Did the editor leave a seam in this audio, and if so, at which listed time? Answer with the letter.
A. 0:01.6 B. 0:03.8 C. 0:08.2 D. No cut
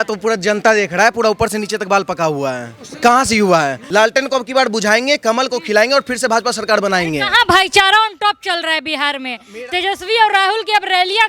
B